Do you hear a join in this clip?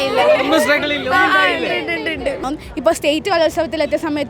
yes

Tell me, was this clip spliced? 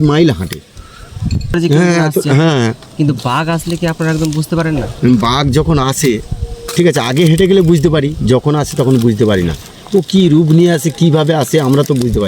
yes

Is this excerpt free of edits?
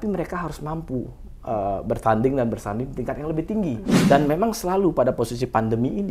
no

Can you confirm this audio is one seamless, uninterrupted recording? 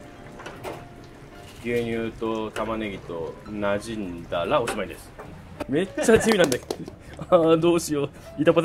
no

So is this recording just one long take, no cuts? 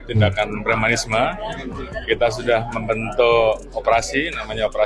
yes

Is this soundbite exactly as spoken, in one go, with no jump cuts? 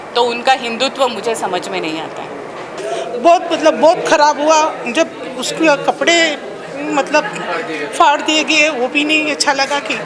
no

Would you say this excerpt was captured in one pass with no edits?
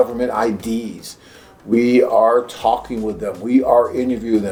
yes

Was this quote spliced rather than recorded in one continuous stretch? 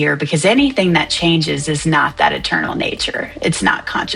no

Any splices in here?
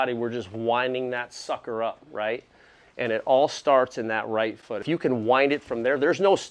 no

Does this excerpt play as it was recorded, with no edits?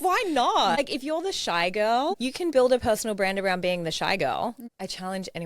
no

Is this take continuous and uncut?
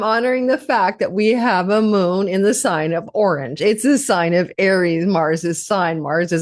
yes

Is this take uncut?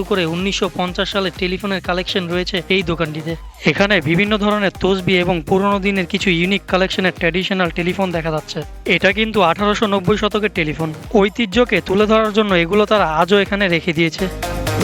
yes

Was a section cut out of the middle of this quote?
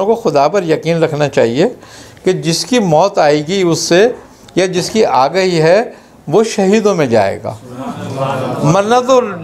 no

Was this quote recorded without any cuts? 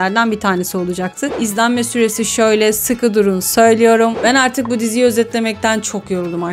no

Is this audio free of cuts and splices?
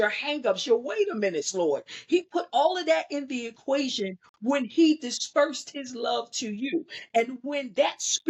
yes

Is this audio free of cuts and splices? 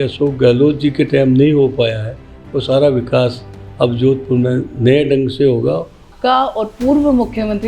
no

